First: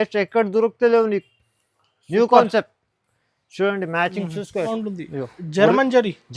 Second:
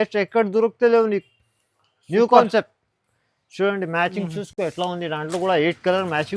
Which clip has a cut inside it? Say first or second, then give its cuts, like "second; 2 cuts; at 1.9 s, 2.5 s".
first; 1 cut; at 4.6 s